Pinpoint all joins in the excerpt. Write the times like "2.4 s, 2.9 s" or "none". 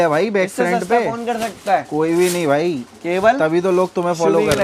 none